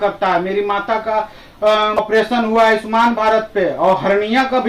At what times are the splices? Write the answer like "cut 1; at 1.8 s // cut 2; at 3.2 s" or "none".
cut 1; at 2.0 s

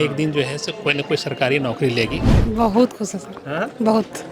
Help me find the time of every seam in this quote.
cut 1; at 2.3 s

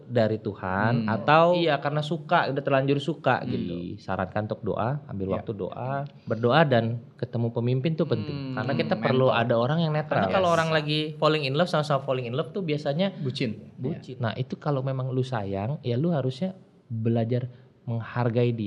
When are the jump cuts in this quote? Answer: cut 1; at 1.6 s // cut 2; at 3.7 s // cut 3; at 6.1 s // cut 4; at 8.4 s // cut 5; at 10.3 s // cut 6; at 14.1 s

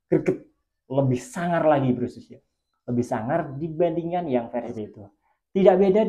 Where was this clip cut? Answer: cut 1; at 4.7 s

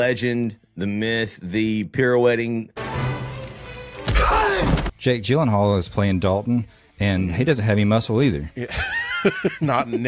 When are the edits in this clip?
cut 1; at 2.8 s // cut 2; at 4.9 s

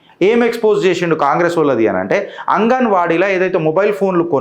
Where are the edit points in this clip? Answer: none

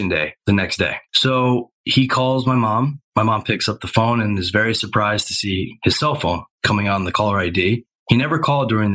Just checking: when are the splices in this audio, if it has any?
none

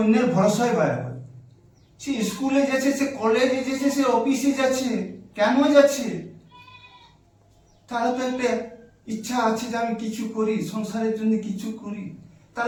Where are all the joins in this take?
none

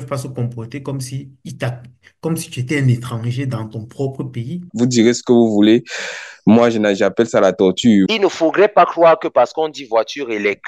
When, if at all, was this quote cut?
cut 1; at 4.7 s // cut 2; at 8.1 s

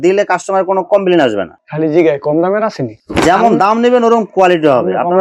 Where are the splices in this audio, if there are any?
none

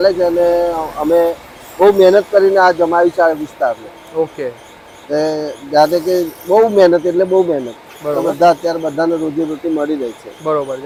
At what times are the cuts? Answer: none

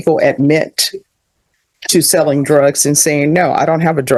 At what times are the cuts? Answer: none

